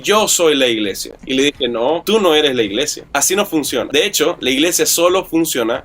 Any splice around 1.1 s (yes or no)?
yes